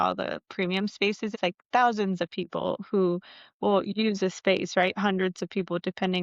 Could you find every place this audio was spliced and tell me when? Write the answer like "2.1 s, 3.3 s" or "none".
1.3 s